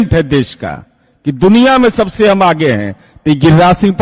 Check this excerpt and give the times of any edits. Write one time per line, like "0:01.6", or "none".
none